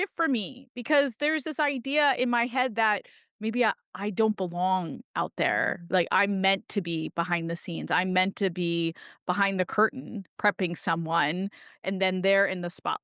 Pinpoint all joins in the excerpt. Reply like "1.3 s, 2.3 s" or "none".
11.8 s